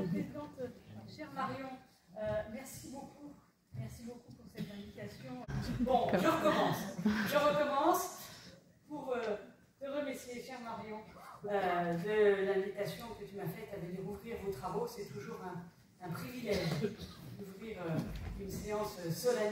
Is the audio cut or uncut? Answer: cut